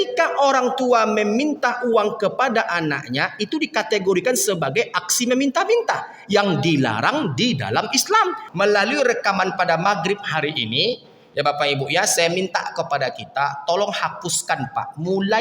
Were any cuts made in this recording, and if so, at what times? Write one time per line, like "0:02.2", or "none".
0:08.4